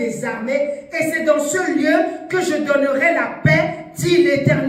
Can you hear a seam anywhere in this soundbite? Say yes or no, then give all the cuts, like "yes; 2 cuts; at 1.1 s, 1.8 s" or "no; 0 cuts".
no; 0 cuts